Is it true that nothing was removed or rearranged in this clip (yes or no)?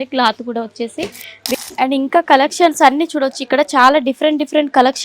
no